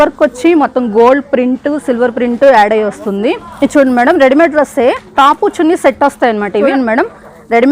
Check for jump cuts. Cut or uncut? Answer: cut